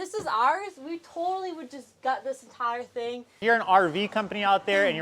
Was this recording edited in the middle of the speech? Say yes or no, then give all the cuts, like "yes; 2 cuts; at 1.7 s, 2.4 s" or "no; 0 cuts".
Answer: yes; 1 cut; at 3.3 s